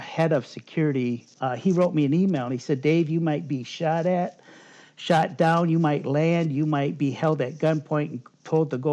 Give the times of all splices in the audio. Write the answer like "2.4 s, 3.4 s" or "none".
1.3 s